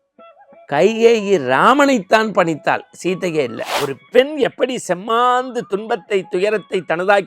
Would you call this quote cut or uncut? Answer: cut